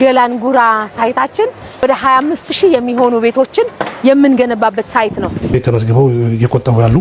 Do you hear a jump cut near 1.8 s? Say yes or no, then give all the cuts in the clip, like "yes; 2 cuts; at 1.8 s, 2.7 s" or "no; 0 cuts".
yes; 2 cuts; at 1.8 s, 5.5 s